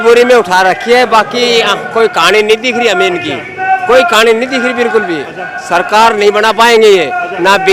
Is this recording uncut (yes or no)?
yes